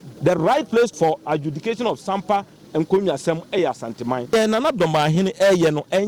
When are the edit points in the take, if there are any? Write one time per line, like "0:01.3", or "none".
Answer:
0:00.9
0:04.3